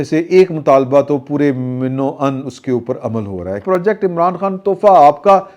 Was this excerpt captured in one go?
no; 1 cut; at 3.6 s

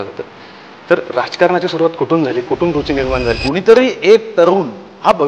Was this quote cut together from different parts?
yes; 1 cut; at 3.3 s

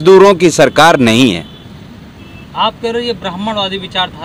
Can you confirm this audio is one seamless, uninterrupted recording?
yes; 0 cuts

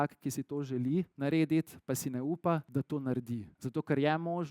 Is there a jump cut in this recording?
yes; 3 cuts; at 1.1 s, 2.7 s, 3.6 s

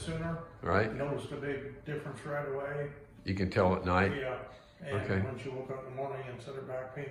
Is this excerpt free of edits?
yes; 0 cuts

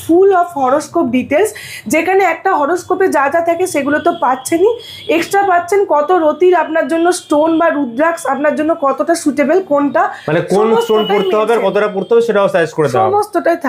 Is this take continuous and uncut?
yes; 0 cuts

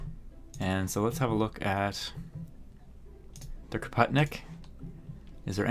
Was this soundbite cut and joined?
yes; 1 cut; at 4.6 s

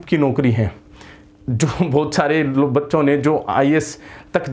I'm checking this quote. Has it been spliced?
no; 0 cuts

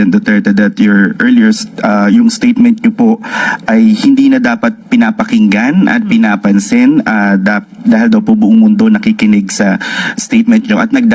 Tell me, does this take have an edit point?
no; 0 cuts

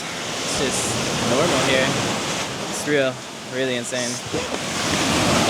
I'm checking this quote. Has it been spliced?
no; 0 cuts

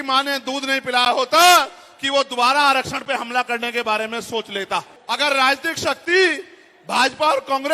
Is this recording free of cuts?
no; 1 cut; at 4.9 s

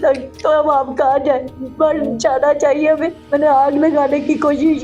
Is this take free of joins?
no; 1 cut; at 3.2 s

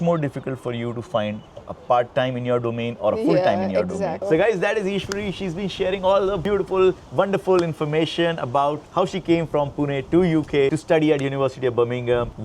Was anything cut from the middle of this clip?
yes; 1 cut; at 4.2 s

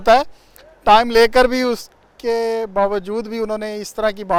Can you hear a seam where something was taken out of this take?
no; 0 cuts

